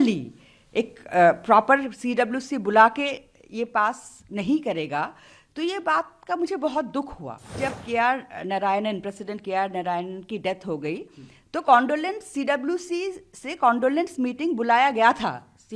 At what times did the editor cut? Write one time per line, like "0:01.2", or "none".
0:07.6